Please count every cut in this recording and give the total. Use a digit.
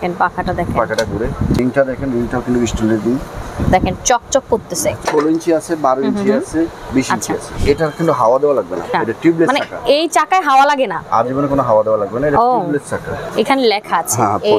6